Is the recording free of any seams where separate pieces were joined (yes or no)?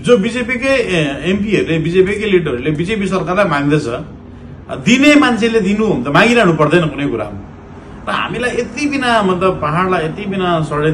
yes